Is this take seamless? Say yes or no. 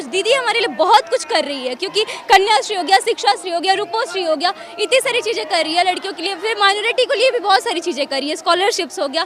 yes